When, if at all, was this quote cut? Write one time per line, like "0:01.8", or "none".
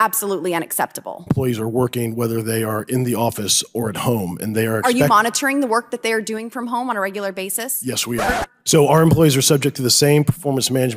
0:01.3
0:08.3